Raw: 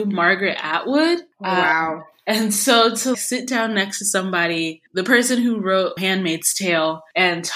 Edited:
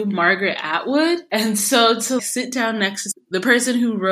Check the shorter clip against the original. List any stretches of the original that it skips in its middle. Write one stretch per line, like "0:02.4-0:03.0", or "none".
0:01.2-0:02.2
0:04.1-0:04.7